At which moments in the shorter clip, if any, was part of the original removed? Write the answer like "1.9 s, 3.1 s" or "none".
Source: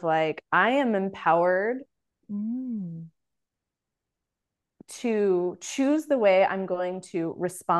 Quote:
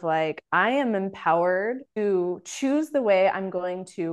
2.0 s